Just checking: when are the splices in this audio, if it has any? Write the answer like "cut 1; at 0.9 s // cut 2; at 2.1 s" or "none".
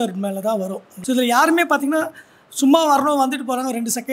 cut 1; at 0.9 s